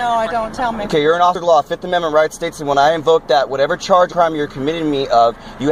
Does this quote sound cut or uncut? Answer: uncut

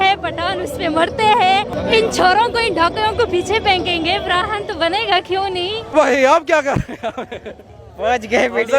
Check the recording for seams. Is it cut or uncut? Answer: cut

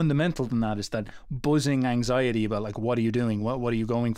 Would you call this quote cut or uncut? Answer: uncut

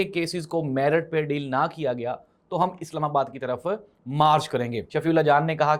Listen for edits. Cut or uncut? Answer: cut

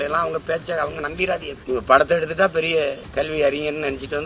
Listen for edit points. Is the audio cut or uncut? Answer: cut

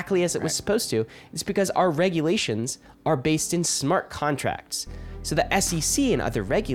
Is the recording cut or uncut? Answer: uncut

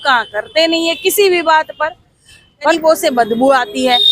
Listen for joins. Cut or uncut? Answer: cut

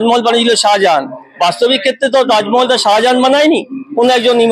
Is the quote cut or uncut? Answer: uncut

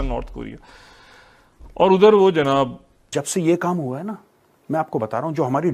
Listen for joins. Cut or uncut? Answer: cut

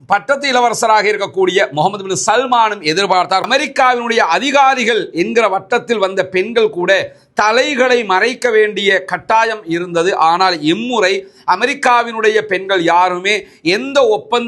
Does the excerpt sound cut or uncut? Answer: cut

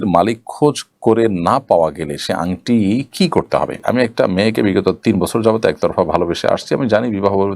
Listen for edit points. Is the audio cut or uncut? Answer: cut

